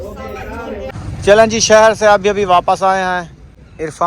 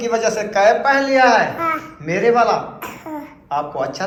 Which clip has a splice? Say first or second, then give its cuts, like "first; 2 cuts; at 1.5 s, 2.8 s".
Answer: first; 1 cut; at 0.9 s